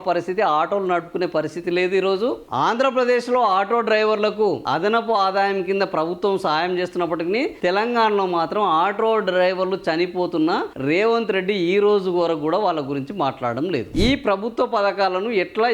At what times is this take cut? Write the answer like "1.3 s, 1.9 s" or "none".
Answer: 13.9 s